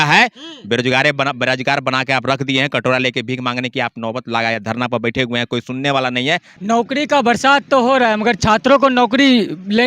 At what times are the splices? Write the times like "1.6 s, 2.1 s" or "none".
6.5 s